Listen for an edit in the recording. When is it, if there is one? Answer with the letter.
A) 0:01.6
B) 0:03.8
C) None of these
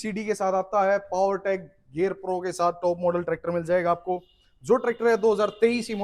C